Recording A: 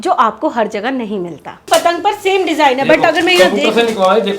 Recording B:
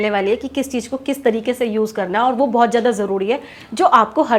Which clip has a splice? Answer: A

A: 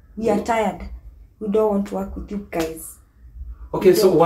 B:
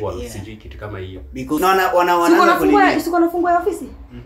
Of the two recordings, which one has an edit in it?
B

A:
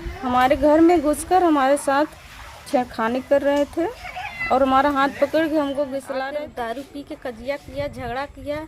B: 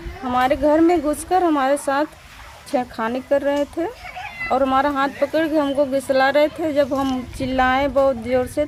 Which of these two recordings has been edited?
A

